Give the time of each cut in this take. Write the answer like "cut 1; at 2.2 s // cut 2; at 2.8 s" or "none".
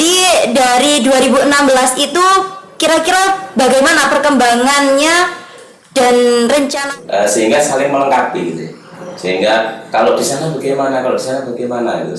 cut 1; at 6.8 s